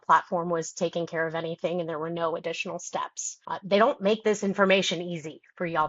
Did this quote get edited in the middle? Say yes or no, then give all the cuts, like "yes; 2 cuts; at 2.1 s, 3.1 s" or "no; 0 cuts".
no; 0 cuts